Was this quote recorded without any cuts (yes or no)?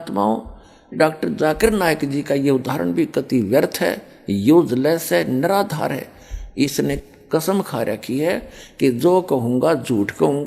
no